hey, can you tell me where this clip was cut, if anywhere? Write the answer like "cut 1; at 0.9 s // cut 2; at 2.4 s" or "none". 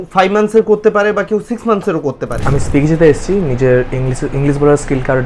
cut 1; at 2.4 s